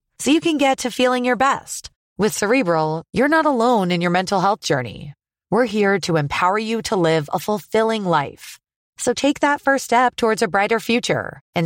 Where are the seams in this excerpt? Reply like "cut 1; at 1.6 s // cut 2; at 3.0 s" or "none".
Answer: none